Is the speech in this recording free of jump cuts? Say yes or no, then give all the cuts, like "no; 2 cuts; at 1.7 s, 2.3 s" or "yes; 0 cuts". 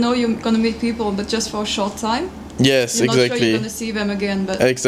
yes; 0 cuts